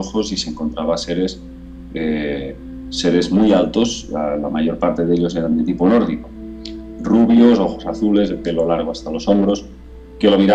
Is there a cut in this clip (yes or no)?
no